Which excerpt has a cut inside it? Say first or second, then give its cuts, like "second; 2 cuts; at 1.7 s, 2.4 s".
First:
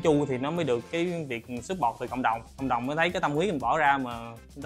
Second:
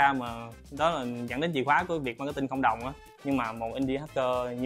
second; 1 cut; at 3.1 s